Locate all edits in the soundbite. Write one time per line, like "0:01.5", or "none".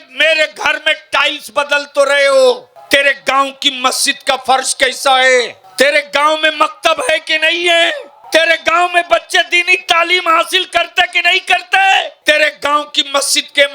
0:02.7
0:05.6
0:08.1
0:12.1